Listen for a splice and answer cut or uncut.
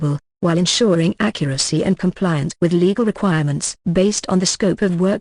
uncut